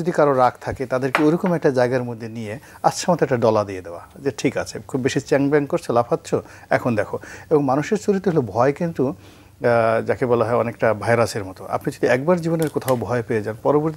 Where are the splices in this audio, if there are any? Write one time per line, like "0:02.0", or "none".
none